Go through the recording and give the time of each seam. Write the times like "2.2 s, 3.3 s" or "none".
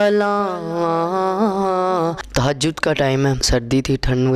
2.2 s, 3.4 s